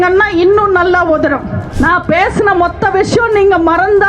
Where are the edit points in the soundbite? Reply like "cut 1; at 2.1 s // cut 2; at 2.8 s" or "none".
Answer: cut 1; at 1.6 s